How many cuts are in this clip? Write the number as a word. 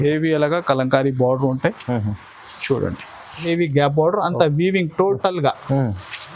one